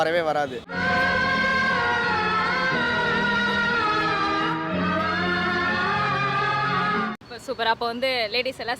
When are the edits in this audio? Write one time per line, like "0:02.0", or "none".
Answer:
0:07.3